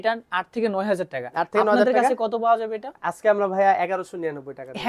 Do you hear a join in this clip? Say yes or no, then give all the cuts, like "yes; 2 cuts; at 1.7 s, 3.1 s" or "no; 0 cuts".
no; 0 cuts